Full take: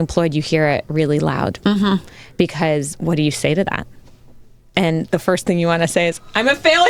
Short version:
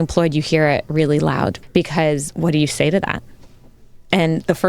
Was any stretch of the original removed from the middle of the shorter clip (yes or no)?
yes